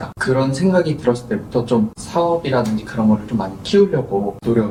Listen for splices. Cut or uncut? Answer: uncut